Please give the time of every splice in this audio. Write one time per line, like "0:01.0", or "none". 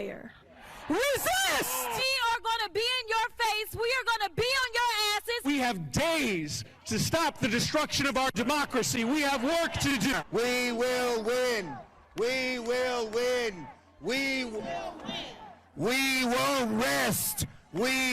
0:10.1